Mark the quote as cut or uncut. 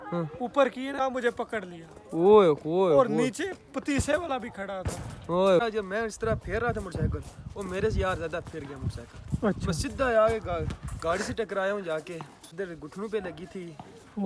cut